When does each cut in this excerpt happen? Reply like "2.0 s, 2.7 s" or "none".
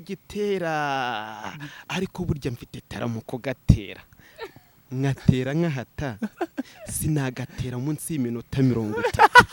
none